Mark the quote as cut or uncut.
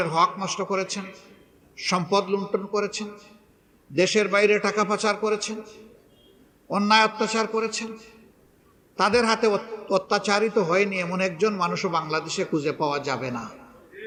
uncut